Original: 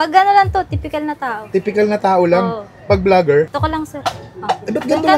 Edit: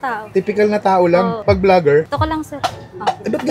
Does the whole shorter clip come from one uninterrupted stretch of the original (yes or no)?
no